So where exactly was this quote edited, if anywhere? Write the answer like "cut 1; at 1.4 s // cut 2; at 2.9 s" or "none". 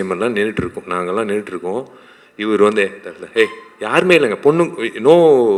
none